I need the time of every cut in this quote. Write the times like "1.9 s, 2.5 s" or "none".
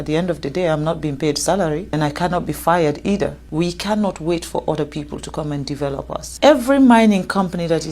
1.9 s, 3.4 s, 6.3 s